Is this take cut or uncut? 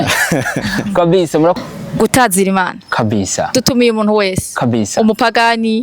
cut